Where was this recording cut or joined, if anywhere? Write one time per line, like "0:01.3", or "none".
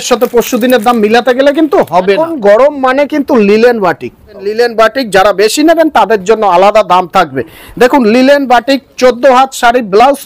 0:02.3
0:04.5